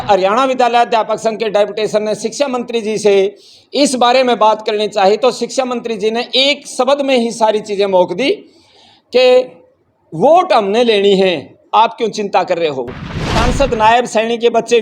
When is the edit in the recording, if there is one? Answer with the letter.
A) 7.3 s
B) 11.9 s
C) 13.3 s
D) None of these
C